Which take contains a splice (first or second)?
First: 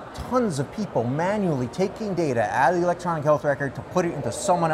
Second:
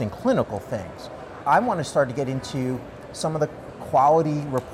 second